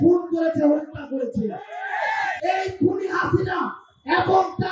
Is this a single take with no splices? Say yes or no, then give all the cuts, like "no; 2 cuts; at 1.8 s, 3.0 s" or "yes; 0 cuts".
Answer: no; 1 cut; at 2.3 s